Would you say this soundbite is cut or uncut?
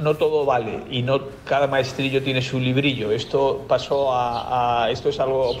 cut